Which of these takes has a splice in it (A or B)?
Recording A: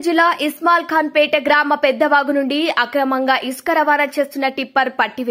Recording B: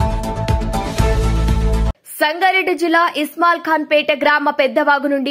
B